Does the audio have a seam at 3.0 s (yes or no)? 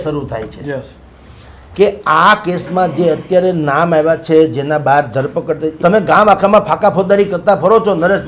no